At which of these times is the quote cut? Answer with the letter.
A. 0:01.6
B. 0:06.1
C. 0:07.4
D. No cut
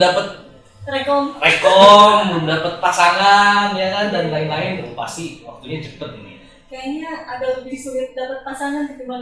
D